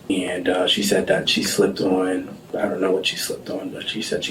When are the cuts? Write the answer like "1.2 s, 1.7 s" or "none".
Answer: none